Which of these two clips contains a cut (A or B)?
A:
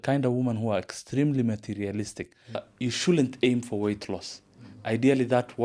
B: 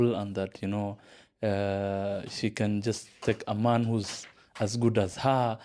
A